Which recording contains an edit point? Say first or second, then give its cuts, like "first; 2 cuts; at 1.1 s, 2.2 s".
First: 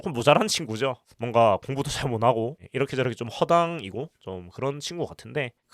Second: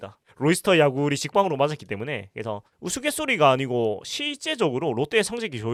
first; 1 cut; at 1.1 s